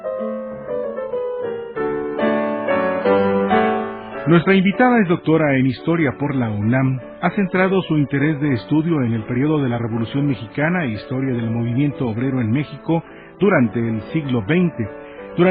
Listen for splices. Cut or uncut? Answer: cut